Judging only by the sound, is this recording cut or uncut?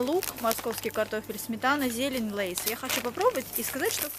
uncut